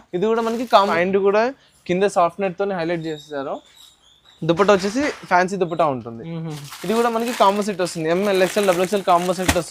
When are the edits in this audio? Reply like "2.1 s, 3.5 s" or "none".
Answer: 0.9 s

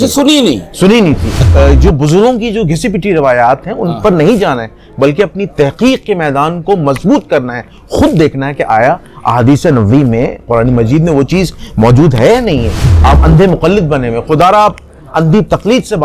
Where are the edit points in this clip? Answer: 1.5 s, 12.9 s

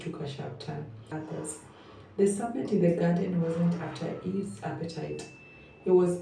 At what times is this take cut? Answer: 1.1 s

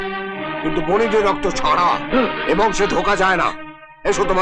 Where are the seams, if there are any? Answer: none

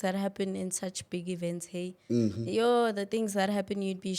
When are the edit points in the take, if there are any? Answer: none

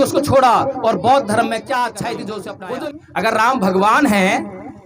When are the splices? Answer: 2.6 s

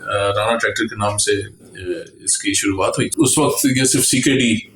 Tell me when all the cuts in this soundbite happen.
3.1 s

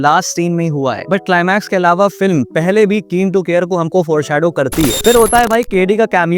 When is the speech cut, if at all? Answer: 5.0 s

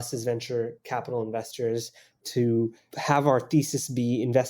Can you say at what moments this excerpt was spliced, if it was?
2.9 s

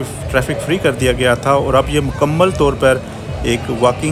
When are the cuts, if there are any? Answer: none

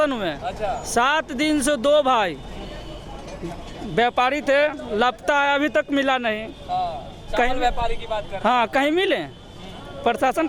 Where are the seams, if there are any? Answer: none

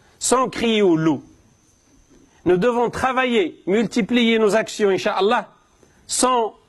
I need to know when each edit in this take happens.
none

